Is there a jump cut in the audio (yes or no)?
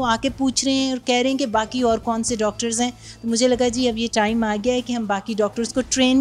no